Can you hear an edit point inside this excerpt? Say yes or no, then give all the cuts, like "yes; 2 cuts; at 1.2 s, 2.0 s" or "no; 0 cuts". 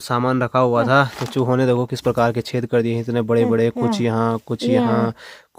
no; 0 cuts